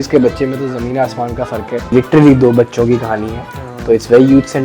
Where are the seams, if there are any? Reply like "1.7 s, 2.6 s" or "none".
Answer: 1.9 s